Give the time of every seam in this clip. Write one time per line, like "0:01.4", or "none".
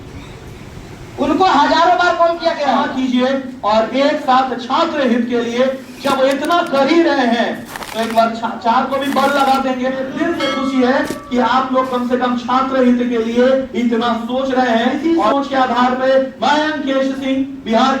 0:02.8
0:10.1
0:15.0

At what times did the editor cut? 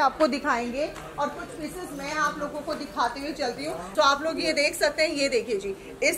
0:03.9

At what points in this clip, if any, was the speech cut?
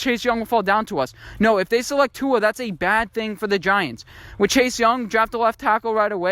none

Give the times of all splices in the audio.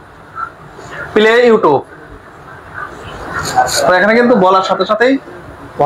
none

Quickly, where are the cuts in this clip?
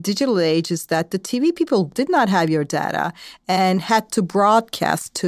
0:01.9

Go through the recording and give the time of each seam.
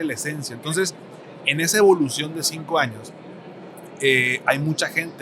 none

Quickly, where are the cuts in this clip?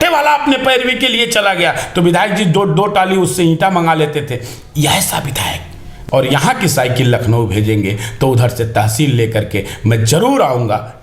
0:06.0

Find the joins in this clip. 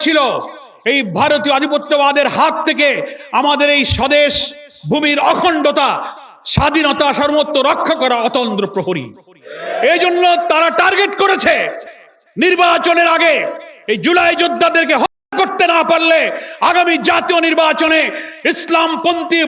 none

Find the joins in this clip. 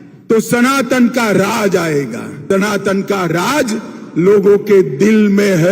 0:02.4

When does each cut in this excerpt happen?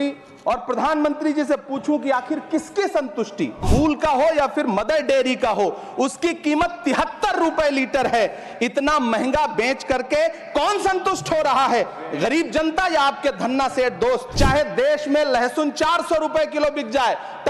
0:03.7
0:14.3

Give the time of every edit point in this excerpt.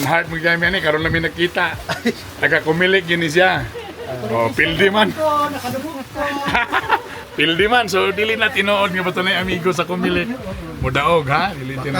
none

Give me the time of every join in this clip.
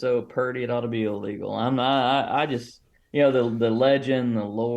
0:03.0

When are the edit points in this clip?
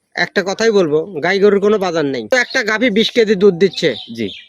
0:02.3

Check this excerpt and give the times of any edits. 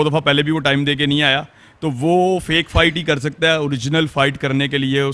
none

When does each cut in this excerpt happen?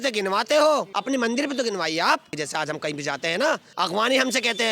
0:00.9
0:02.4
0:03.7

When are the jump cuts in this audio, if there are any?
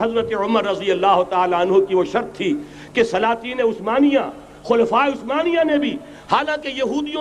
none

